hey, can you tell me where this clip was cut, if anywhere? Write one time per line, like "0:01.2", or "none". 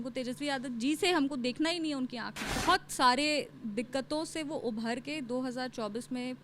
0:02.6